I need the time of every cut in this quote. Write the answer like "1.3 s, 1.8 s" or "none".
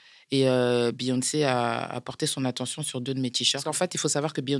3.6 s